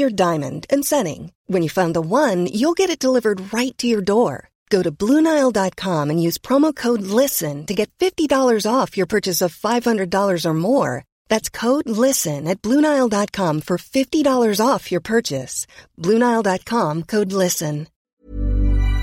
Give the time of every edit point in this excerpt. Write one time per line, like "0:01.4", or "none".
0:18.1